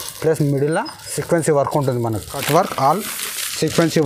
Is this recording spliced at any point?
yes; 1 cut; at 2.3 s

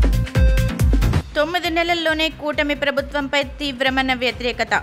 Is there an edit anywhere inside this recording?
yes; 1 cut; at 1.2 s

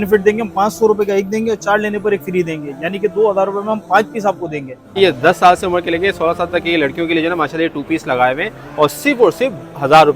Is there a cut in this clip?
yes; 1 cut; at 5.0 s

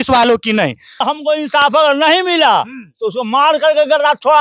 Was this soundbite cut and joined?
yes; 1 cut; at 1.0 s

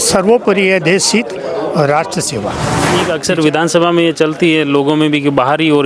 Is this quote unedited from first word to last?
no; 1 cut; at 2.7 s

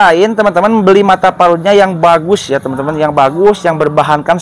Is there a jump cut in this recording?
no; 0 cuts

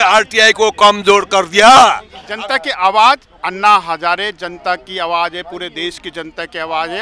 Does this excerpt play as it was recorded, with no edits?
no; 1 cut; at 2.2 s

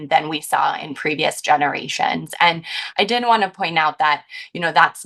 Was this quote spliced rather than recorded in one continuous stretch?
no; 0 cuts

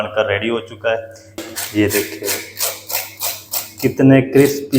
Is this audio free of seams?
no; 1 cut; at 1.4 s

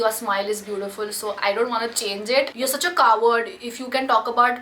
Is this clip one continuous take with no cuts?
no; 1 cut; at 2.5 s

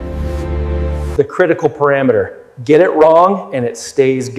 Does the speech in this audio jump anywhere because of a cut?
yes; 1 cut; at 1.1 s

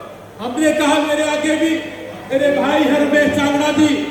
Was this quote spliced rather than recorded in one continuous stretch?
no; 0 cuts

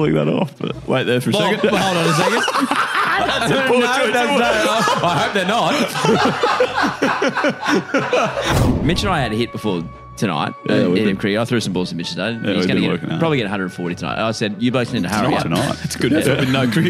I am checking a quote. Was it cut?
yes; 1 cut; at 8.5 s

